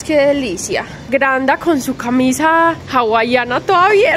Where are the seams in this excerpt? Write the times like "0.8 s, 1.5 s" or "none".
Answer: 1.1 s, 2.8 s